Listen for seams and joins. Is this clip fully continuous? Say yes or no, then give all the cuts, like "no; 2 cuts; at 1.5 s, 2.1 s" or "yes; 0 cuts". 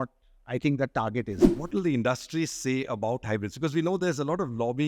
no; 1 cut; at 1.4 s